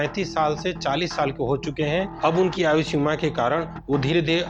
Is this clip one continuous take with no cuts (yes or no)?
yes